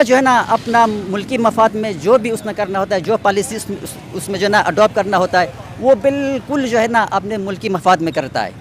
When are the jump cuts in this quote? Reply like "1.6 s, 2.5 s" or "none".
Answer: none